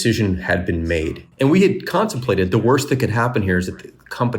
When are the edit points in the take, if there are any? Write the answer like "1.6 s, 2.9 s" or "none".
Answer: 1.2 s